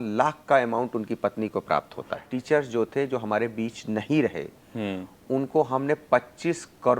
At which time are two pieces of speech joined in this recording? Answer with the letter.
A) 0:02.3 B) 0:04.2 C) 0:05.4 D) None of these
A